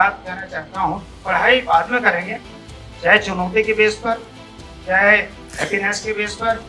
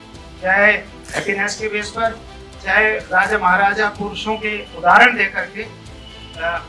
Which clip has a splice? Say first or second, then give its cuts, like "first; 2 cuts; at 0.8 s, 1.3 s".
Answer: first; 1 cut; at 1.1 s